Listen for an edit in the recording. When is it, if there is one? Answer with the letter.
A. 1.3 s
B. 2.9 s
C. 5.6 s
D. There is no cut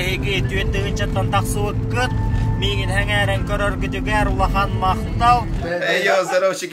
C